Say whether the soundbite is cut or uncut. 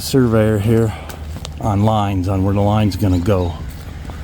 uncut